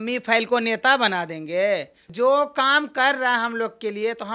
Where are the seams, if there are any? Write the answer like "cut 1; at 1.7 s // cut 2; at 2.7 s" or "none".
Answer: none